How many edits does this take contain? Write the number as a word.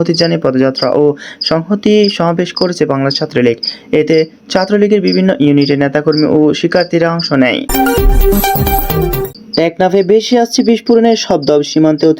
two